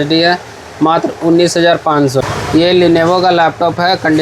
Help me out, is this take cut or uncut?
cut